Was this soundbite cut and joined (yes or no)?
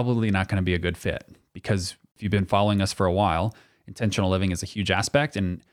yes